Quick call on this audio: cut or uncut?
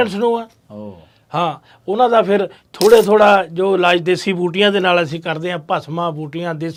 uncut